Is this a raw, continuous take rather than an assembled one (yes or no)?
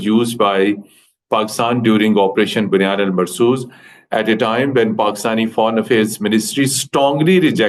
yes